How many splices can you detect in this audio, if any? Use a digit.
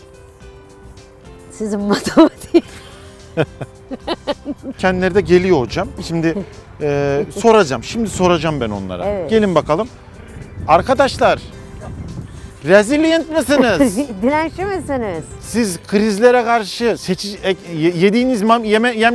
1